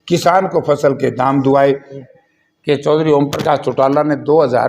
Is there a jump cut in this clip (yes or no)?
yes